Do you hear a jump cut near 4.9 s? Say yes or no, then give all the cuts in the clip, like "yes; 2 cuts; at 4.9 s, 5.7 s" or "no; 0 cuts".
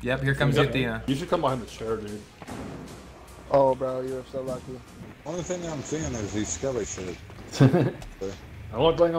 yes; 2 cuts; at 1.0 s, 4.9 s